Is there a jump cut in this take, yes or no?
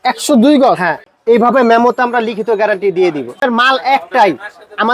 yes